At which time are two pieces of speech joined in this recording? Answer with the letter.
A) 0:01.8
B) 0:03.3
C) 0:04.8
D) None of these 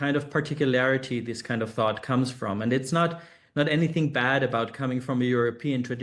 D